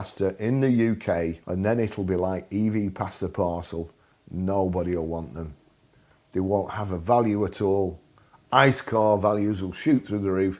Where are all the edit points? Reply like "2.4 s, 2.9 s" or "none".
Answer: 1.4 s